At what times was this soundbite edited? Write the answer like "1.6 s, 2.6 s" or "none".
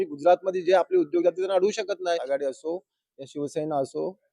2.2 s